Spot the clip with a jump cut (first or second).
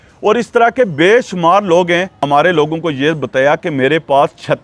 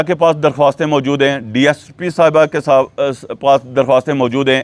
first